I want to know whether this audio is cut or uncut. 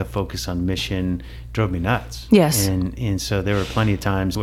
uncut